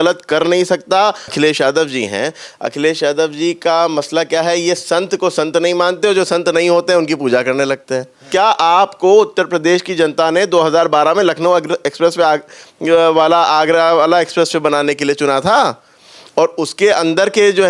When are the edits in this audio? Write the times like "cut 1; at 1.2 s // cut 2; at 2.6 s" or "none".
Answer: cut 1; at 1.3 s // cut 2; at 8.2 s